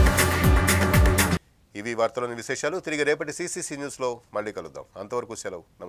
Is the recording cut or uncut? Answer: uncut